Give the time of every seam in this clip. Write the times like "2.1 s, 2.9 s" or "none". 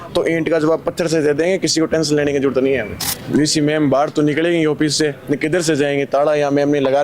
3.1 s